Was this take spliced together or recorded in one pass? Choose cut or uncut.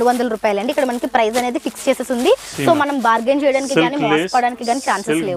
uncut